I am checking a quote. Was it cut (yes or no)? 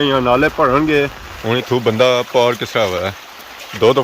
yes